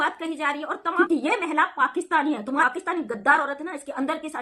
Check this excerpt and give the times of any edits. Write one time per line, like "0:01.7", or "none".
0:00.9
0:02.6